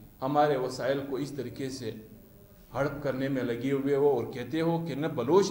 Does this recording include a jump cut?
no; 0 cuts

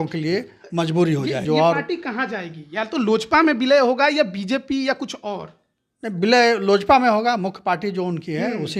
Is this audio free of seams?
no; 1 cut; at 1.4 s

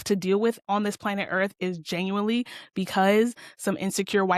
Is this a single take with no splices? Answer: yes; 0 cuts

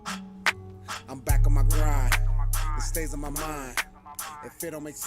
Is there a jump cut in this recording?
yes; 1 cut; at 0.9 s

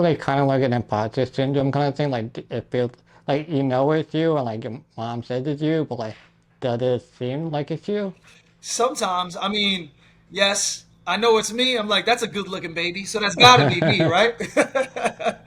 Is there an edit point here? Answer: no; 0 cuts

